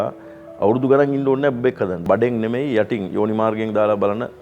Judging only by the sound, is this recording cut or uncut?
cut